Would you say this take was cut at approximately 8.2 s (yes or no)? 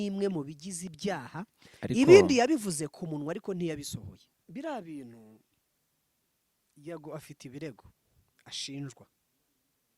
no